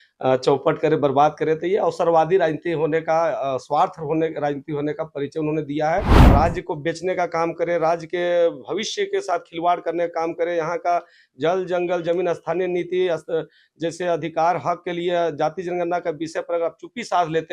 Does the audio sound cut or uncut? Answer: cut